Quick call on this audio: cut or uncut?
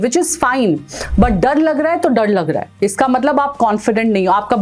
uncut